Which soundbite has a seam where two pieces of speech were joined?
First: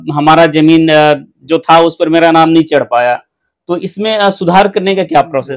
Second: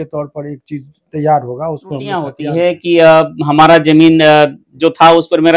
second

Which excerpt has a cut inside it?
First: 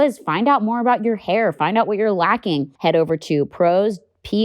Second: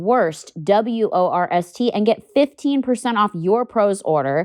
first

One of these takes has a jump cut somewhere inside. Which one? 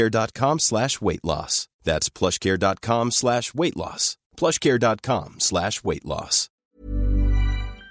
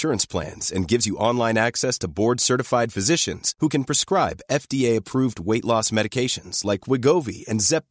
first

